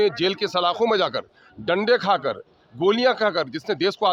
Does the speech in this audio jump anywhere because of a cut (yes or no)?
no